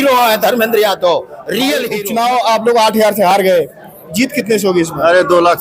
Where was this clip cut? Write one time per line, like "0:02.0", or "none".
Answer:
0:01.9